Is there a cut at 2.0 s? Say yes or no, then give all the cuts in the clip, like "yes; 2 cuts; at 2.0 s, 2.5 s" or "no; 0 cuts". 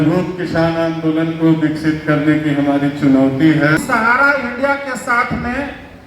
no; 1 cut; at 4.2 s